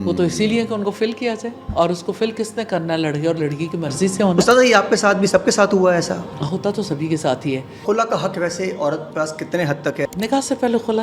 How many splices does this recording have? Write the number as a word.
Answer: three